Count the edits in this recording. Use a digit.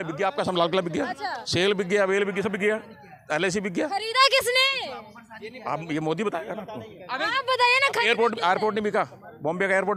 0